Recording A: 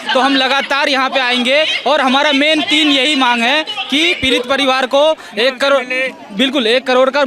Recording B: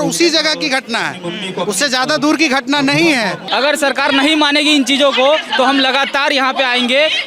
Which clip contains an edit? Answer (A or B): B